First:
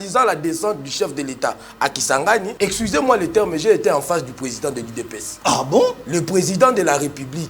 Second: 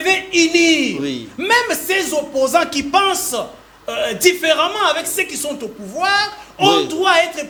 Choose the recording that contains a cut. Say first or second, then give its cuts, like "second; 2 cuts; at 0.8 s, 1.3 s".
first; 2 cuts; at 2.5 s, 5.2 s